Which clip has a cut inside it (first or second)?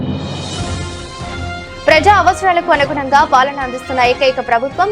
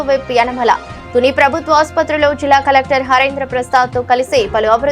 first